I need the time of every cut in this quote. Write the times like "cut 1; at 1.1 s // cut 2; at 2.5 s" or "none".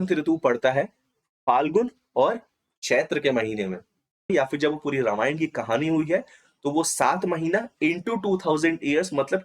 cut 1; at 4.3 s